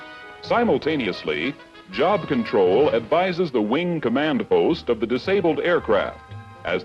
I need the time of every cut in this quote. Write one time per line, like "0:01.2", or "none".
0:05.2

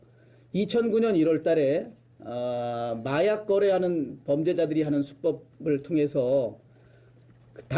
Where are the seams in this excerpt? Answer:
none

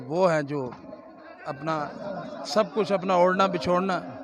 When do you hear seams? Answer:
none

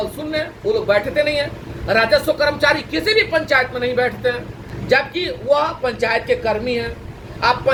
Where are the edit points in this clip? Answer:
none

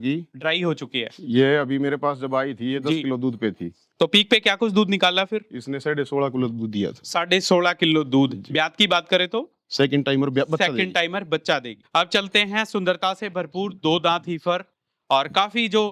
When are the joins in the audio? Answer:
0:11.9

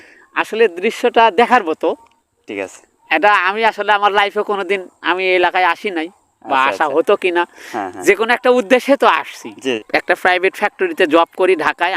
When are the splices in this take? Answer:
0:09.8

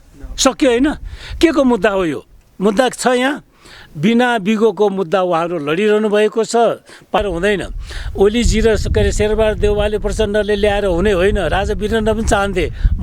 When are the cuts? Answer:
0:07.2

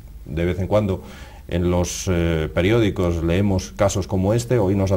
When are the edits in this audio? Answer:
0:02.6

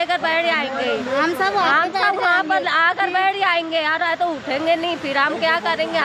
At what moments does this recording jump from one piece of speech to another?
none

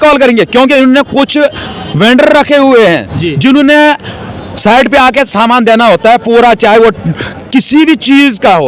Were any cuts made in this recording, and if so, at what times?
none

